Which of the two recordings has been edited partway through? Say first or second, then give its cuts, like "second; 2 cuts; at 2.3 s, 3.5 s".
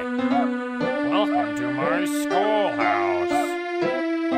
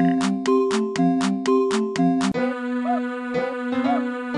second; 1 cut; at 2.4 s